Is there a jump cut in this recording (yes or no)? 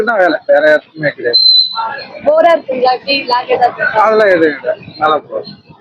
no